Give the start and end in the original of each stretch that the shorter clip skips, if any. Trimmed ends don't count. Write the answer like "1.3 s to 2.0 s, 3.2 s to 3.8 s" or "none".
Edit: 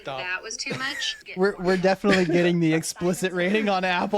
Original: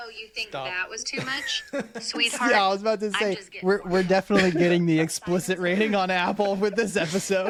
1.7 s to 3.5 s